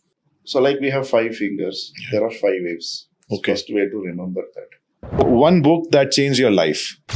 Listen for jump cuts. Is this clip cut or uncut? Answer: cut